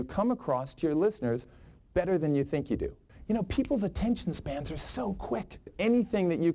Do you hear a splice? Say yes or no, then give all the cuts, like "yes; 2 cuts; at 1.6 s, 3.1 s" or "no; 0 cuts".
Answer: yes; 2 cuts; at 3.1 s, 5.7 s